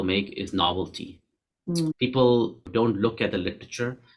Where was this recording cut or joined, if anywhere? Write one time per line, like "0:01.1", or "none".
0:02.6